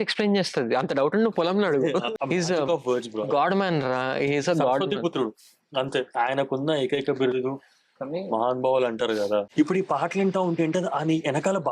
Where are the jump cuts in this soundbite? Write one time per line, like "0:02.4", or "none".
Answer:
0:02.2
0:09.5